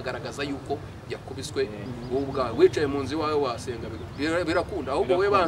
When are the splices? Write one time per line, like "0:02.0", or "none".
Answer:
0:01.9